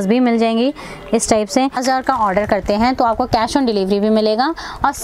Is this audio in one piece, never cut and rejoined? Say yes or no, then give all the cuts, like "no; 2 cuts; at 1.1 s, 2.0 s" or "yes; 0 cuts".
no; 1 cut; at 1.8 s